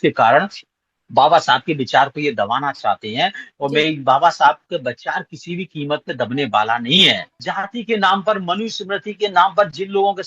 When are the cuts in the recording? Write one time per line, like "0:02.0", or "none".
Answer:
0:07.4